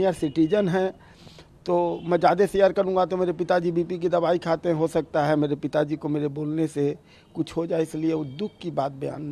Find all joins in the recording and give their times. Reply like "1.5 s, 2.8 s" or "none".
none

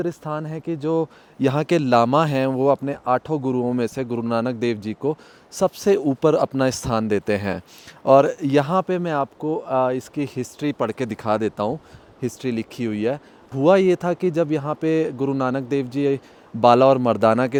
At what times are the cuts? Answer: none

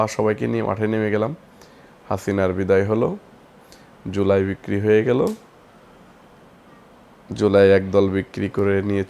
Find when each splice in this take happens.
none

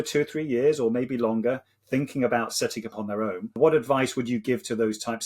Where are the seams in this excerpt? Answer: 3.6 s

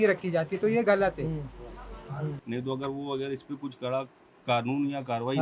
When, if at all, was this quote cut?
2.4 s

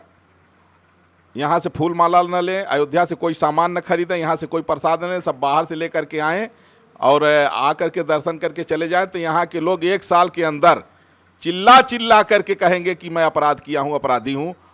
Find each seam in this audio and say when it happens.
none

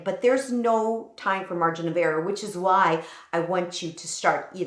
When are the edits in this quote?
none

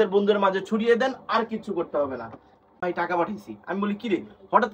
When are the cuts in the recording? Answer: 2.8 s

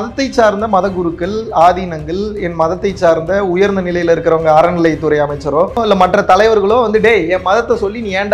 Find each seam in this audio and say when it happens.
5.8 s

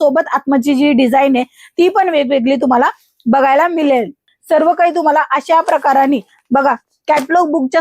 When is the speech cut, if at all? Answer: 4.3 s

